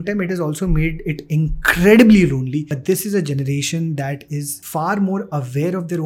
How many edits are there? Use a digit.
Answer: 2